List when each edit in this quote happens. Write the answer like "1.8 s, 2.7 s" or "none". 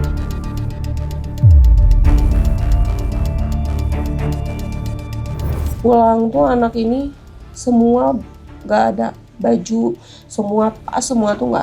5.6 s